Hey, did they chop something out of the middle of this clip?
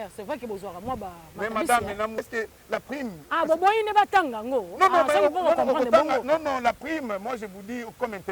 yes; 1 cut; at 2.2 s

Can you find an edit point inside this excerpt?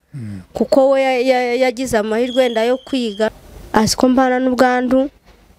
no; 0 cuts

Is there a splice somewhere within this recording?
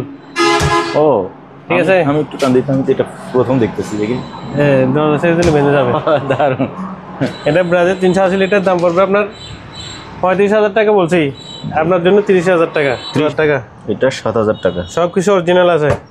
yes; 1 cut; at 13.2 s

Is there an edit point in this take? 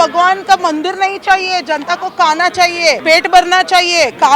yes; 1 cut; at 3.0 s

